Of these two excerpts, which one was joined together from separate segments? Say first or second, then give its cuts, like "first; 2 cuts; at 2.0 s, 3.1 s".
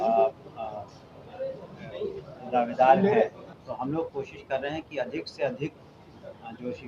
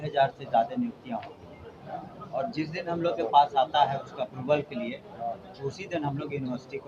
first; 1 cut; at 3.5 s